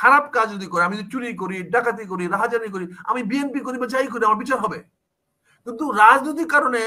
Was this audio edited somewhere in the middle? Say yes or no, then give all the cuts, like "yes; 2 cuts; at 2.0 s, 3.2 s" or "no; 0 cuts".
no; 0 cuts